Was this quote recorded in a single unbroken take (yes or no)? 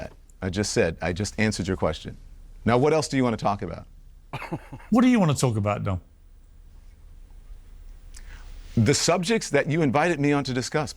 yes